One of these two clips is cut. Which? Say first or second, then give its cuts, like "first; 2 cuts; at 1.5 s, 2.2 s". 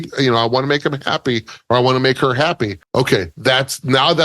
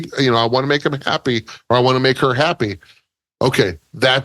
first; 1 cut; at 3.3 s